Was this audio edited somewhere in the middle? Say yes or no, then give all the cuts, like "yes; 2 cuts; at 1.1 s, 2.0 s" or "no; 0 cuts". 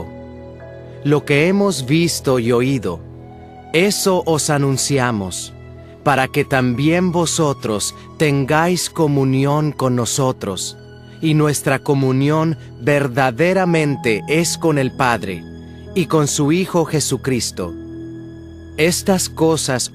yes; 1 cut; at 3.9 s